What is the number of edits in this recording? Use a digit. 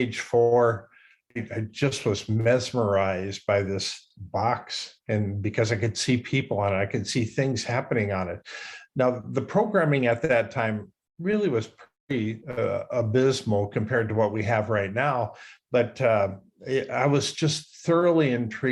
2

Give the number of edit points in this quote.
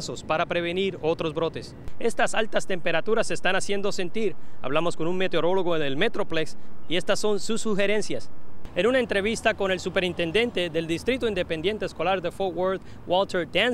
2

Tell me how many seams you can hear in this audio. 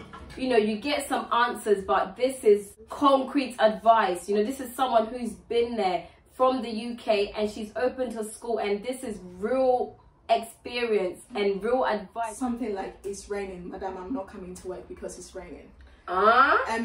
2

